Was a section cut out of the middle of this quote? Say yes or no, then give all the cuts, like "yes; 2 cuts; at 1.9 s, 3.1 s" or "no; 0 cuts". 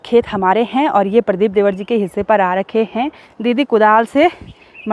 yes; 1 cut; at 3.2 s